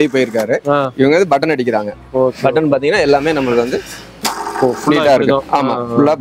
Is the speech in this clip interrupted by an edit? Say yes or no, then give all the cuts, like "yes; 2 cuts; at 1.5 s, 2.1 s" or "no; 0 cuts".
no; 0 cuts